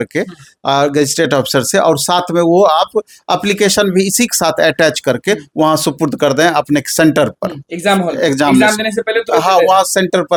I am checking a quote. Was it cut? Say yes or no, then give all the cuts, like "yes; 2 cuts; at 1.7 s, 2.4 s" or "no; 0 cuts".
no; 0 cuts